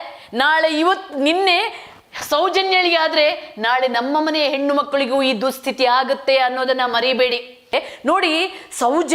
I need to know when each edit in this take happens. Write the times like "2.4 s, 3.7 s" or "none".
7.7 s